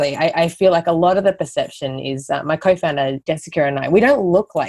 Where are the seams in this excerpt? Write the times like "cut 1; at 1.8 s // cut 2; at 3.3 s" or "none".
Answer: cut 1; at 3.2 s